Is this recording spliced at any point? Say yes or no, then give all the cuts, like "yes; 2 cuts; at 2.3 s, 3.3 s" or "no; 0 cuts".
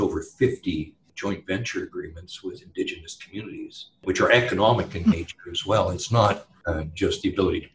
yes; 3 cuts; at 1.0 s, 3.8 s, 6.6 s